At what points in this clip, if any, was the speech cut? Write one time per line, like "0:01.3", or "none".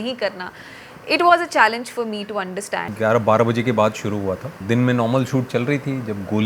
0:02.9
0:04.6